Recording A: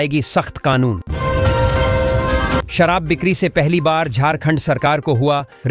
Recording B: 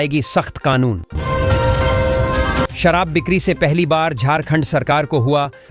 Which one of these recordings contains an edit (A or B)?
A